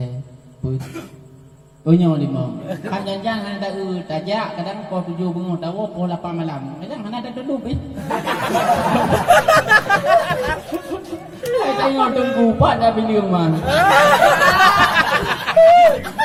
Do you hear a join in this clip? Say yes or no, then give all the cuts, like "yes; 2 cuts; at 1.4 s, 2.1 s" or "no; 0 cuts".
no; 0 cuts